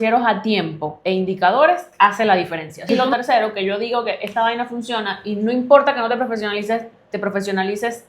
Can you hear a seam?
yes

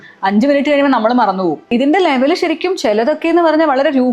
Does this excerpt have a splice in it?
yes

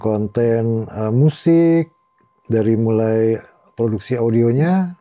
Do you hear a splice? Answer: no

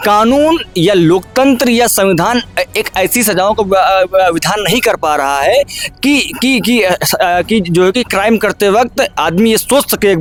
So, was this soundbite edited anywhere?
no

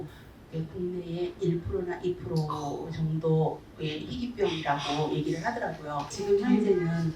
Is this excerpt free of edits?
no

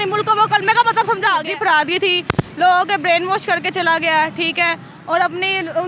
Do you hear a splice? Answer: yes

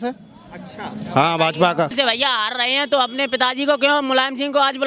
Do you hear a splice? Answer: yes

